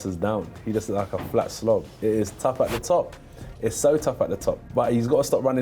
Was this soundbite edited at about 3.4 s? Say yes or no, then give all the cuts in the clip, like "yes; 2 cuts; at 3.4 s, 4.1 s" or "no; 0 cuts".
no; 2 cuts; at 2.0 s, 4.6 s